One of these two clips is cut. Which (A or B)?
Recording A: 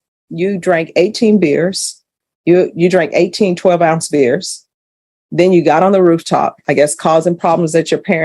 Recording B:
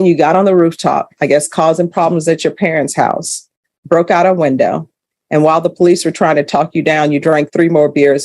A